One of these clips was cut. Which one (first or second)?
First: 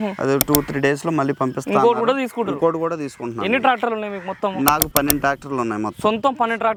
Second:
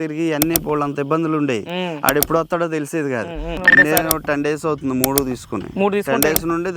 second